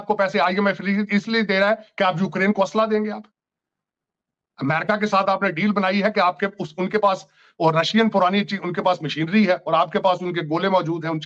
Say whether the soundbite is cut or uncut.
uncut